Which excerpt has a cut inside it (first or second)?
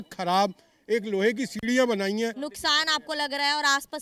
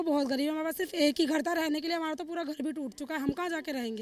first